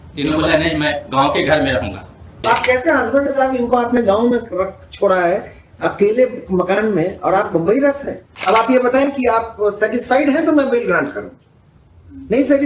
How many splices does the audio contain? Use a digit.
2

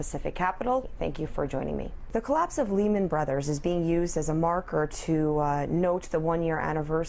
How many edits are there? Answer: 1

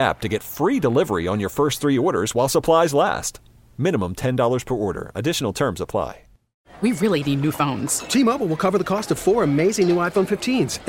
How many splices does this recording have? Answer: 1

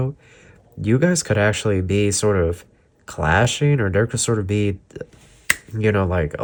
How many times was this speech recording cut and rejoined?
0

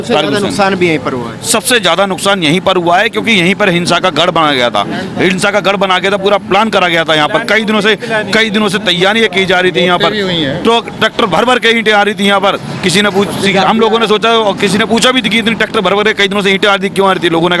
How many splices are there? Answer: 0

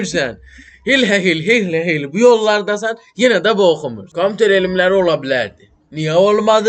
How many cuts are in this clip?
1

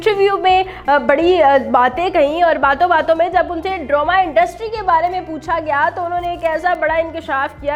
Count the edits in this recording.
0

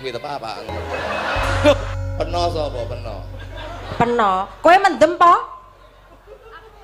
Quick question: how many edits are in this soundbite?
1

